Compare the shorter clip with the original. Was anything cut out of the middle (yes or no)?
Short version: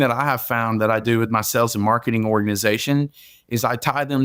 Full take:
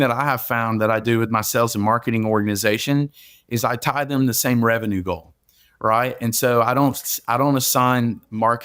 no